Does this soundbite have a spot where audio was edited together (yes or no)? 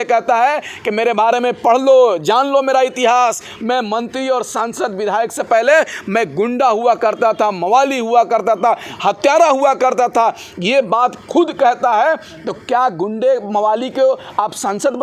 no